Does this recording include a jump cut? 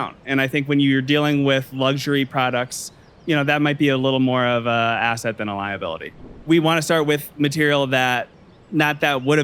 yes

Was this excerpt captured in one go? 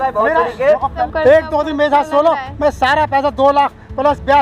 no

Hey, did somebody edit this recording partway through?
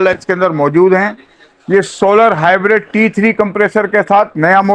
no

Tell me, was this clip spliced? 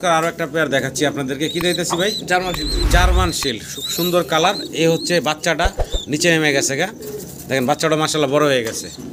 no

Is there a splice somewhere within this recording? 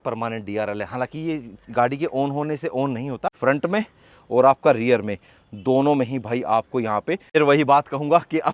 yes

